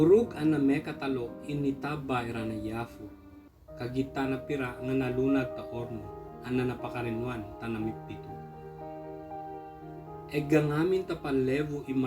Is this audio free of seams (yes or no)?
no